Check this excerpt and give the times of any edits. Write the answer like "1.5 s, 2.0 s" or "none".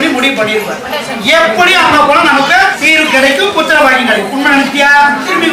2.8 s